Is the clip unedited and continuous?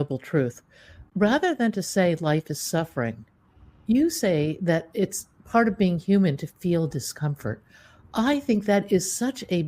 no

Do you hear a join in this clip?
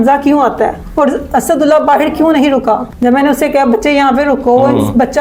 no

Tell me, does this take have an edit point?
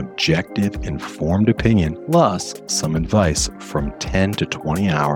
yes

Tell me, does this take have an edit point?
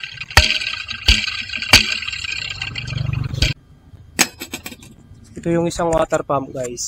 yes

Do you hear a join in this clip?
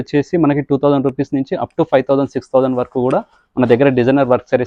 no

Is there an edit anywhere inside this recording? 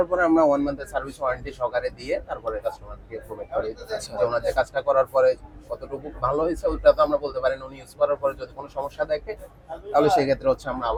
no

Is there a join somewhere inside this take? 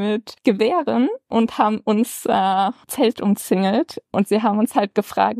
yes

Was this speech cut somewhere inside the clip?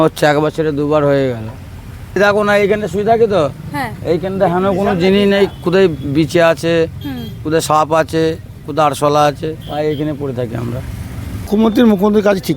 yes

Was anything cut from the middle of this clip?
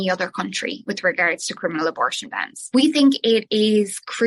yes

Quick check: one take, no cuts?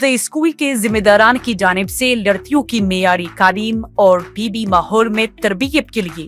yes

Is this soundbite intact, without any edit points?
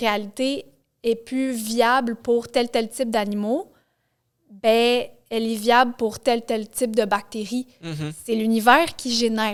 yes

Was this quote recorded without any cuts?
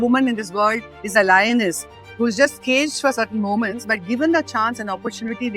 yes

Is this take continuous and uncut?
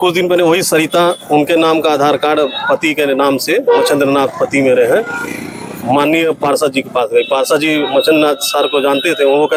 yes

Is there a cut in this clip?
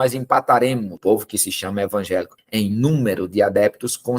yes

